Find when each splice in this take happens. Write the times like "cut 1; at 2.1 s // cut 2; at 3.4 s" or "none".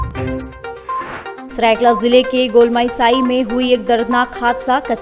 cut 1; at 1.4 s